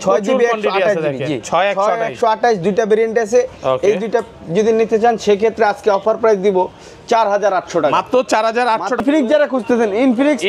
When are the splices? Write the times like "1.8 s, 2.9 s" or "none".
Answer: 9.0 s